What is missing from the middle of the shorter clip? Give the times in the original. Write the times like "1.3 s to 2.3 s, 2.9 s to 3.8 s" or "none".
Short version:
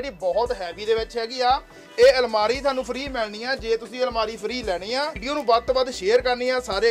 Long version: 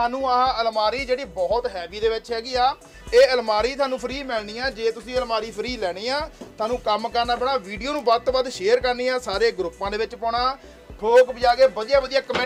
6.3 s to 7.8 s